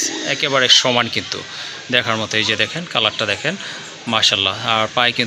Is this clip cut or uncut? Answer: uncut